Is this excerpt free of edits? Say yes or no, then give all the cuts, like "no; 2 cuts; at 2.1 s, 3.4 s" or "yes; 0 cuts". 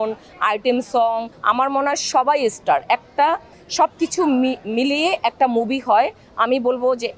no; 1 cut; at 1.3 s